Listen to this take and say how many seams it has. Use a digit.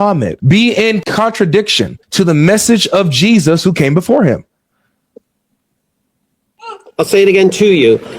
1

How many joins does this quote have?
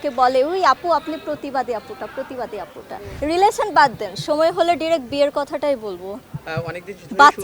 1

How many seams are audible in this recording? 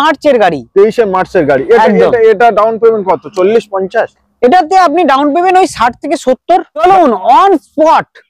1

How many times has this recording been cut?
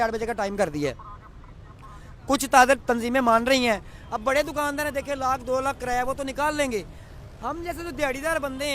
1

